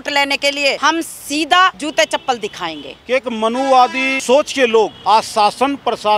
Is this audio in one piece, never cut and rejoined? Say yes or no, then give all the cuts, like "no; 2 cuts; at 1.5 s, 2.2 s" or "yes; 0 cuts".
no; 5 cuts; at 0.8 s, 1.8 s, 2.9 s, 4.1 s, 5.0 s